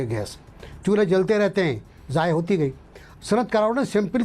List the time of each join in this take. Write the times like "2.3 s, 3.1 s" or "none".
3.0 s